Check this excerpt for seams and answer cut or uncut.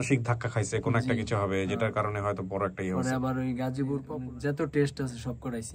cut